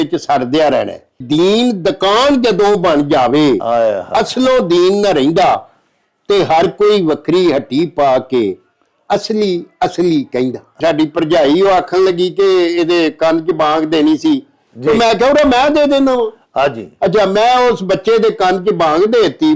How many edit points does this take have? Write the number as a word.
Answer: two